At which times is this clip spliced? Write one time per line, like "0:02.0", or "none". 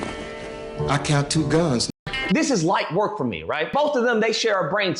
0:02.1
0:03.7